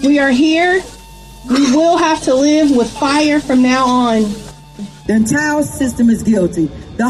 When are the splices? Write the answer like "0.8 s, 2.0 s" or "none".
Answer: 4.9 s

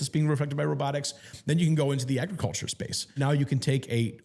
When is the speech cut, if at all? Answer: 3.2 s

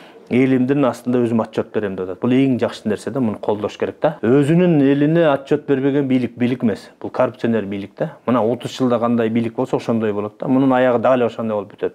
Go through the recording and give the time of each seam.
none

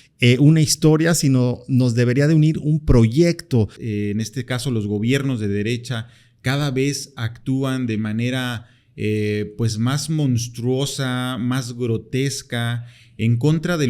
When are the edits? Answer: 3.8 s

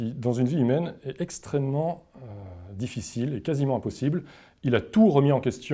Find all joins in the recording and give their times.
none

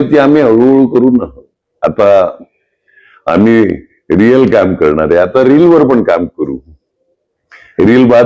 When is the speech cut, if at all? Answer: none

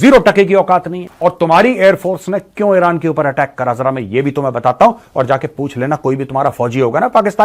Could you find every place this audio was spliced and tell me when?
1.0 s

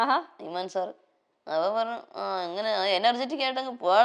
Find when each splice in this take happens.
none

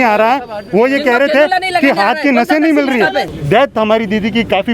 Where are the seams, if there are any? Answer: 3.3 s

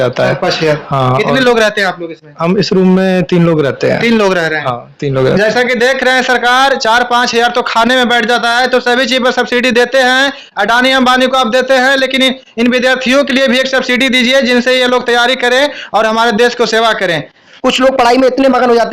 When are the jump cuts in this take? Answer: 17.4 s

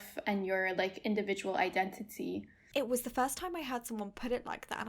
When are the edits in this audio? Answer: 2.5 s

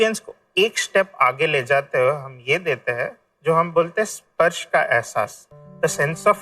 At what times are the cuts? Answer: none

